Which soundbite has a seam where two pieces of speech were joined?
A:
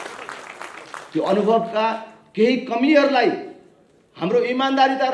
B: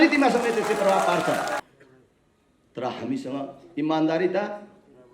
B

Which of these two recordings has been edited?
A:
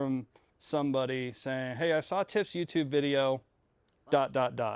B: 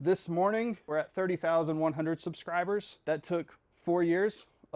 B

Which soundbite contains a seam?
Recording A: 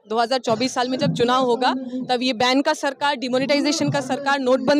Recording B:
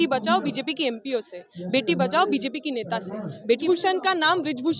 B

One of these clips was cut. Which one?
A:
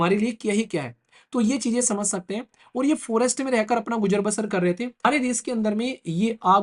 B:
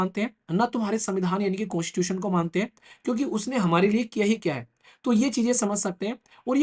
A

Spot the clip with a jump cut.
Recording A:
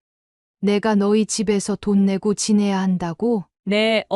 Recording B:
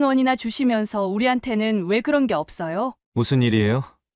B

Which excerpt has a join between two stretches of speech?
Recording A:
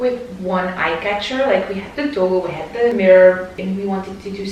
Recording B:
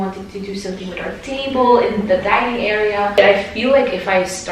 B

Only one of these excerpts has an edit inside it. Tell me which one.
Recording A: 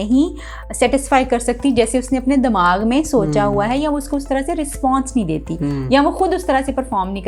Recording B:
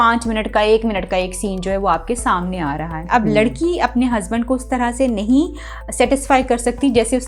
B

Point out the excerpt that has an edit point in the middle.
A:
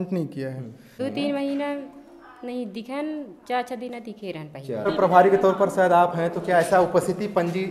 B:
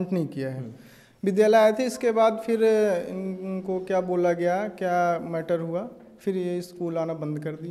A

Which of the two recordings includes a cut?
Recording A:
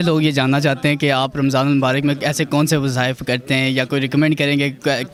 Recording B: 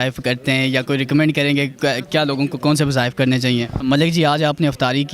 B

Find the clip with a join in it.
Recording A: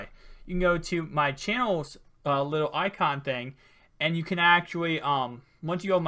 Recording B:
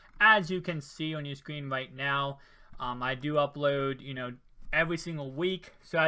A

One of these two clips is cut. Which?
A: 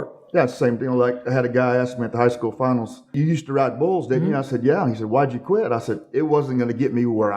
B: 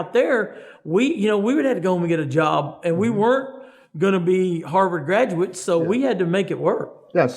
A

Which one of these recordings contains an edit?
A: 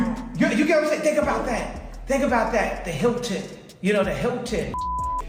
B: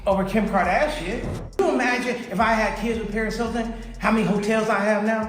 B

